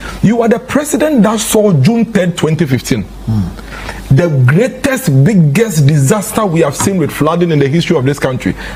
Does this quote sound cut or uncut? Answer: uncut